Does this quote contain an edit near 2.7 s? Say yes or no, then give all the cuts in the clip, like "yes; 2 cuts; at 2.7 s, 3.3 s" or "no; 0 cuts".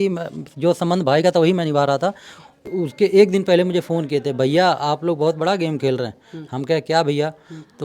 yes; 1 cut; at 2.7 s